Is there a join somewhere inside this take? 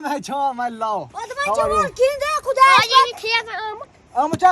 no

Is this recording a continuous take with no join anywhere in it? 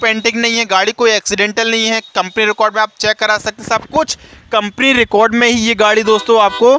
yes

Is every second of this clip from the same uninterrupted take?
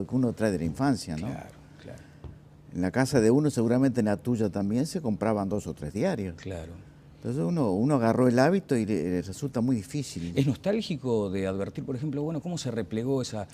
no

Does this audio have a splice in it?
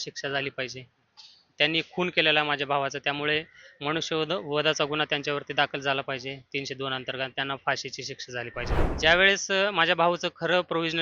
yes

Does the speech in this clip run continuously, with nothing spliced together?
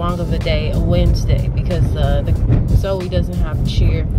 yes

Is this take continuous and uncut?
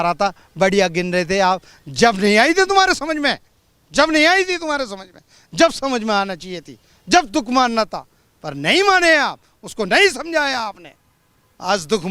yes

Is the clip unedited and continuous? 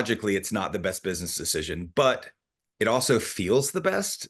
yes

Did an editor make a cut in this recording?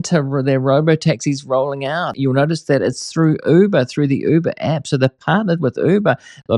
yes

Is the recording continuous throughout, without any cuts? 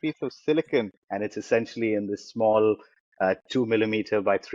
no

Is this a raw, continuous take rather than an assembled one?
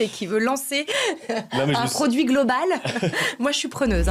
yes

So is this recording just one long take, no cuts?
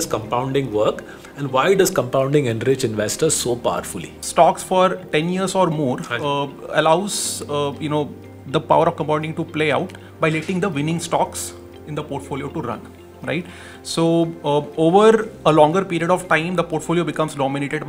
no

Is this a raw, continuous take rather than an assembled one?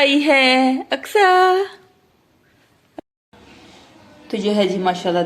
no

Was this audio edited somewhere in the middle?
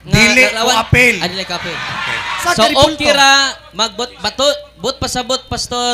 yes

